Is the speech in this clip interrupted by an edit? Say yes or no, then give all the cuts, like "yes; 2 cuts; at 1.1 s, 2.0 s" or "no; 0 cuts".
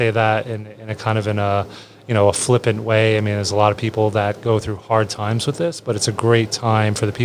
no; 0 cuts